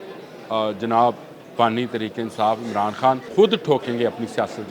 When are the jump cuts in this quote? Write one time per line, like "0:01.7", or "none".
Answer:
0:03.2